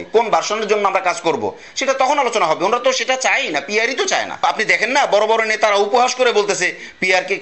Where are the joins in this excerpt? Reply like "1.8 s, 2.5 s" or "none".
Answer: 4.4 s